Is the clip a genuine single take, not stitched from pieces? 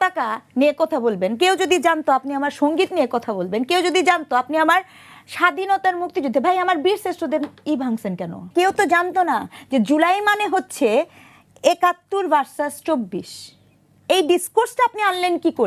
no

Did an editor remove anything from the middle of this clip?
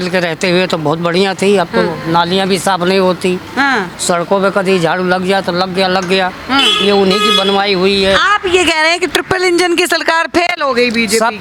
no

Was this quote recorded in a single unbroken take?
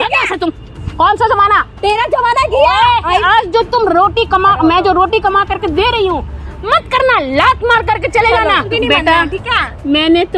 no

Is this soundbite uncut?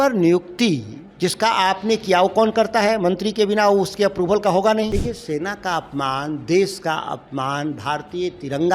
no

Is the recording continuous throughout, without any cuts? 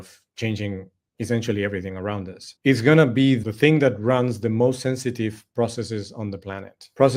yes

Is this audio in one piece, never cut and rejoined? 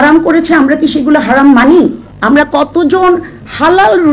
no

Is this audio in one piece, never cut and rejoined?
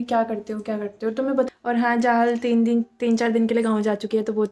no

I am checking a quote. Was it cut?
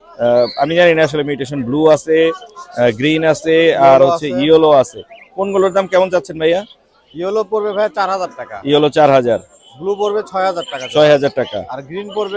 no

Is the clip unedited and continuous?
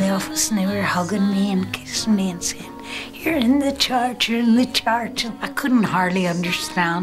no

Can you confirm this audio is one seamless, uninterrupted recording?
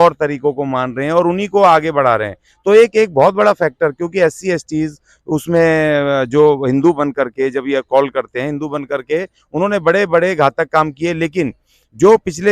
yes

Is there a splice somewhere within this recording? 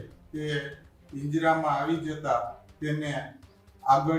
no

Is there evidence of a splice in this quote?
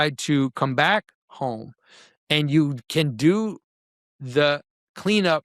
no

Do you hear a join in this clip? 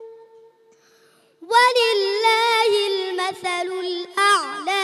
no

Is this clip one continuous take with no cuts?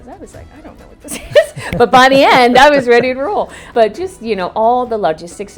no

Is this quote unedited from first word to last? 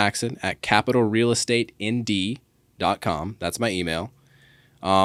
yes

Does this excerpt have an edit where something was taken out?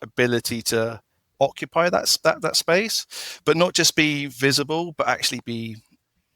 no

